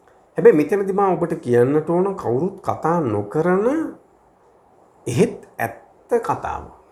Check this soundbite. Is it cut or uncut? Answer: uncut